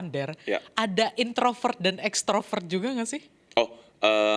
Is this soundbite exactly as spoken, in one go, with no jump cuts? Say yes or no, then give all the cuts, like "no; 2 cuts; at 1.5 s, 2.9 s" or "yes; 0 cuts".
yes; 0 cuts